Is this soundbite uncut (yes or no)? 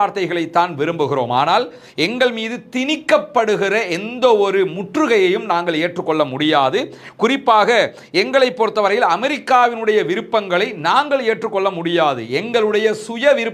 yes